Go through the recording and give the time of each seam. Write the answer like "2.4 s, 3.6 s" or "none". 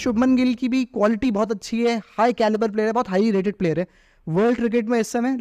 none